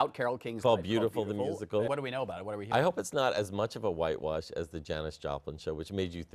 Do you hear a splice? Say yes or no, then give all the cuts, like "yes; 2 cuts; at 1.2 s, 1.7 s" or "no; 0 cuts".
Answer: yes; 1 cut; at 1.9 s